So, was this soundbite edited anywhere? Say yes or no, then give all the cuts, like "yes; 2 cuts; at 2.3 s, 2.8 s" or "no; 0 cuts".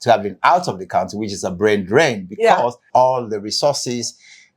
yes; 1 cut; at 2.8 s